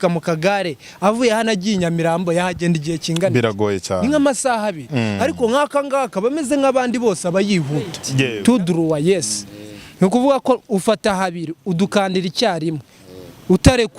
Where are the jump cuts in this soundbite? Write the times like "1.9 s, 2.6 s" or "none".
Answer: 8.3 s